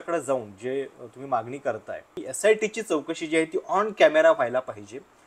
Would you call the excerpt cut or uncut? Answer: cut